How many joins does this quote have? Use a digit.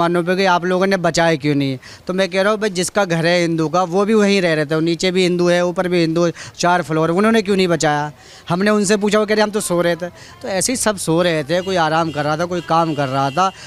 0